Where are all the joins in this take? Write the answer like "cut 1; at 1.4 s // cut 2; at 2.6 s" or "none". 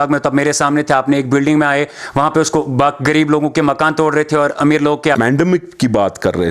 cut 1; at 5.2 s